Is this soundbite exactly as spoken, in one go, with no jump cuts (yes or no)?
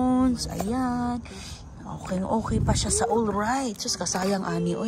yes